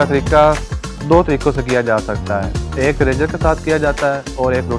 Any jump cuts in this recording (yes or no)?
no